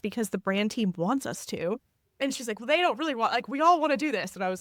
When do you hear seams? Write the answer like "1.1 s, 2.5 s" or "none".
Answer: none